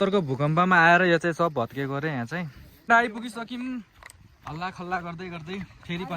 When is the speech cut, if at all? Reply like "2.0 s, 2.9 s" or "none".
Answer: 2.9 s

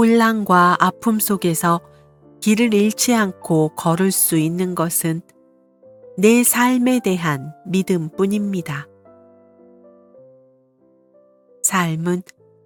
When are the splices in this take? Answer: none

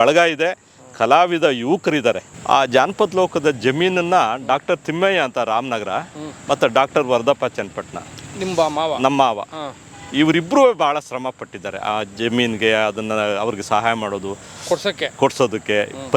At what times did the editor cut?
2.3 s

